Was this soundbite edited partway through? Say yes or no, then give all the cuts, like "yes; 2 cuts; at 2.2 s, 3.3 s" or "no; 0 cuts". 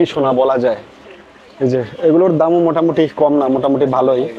no; 0 cuts